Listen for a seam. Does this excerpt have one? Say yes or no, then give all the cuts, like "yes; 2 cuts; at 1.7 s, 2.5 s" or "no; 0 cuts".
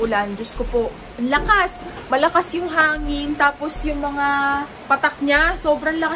no; 0 cuts